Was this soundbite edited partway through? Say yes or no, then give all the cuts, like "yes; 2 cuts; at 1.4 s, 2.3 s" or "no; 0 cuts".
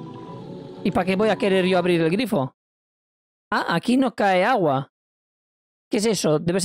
no; 0 cuts